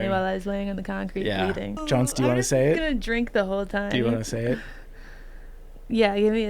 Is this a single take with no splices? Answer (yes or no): no